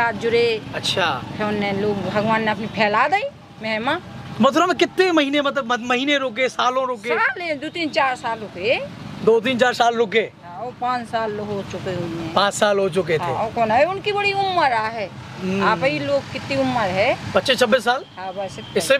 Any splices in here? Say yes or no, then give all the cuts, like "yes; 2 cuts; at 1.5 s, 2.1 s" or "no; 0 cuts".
no; 0 cuts